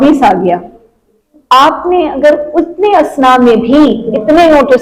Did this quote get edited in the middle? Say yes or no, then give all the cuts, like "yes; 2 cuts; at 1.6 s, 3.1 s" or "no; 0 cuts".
no; 0 cuts